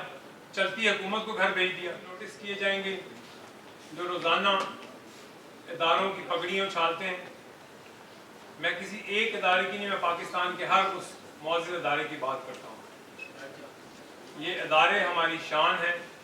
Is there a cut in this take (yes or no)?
yes